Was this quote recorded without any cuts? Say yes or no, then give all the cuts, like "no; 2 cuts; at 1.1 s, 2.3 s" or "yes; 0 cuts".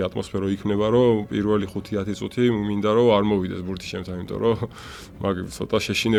yes; 0 cuts